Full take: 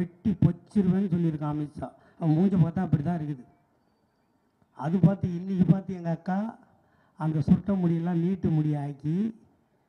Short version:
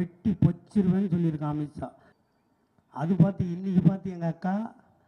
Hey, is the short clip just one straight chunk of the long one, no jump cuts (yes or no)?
no